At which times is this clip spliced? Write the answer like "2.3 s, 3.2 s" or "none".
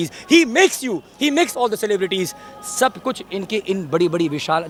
none